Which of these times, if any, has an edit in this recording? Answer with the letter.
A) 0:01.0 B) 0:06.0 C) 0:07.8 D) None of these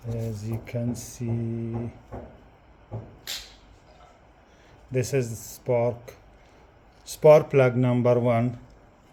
D